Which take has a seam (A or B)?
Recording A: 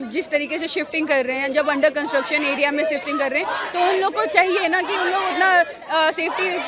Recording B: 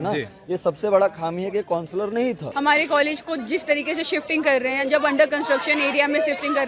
B